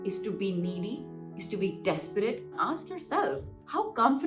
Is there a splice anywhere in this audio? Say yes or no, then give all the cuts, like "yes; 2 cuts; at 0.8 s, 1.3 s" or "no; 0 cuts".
yes; 1 cut; at 2.6 s